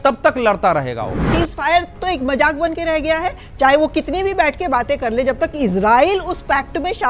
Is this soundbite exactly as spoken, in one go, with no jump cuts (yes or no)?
no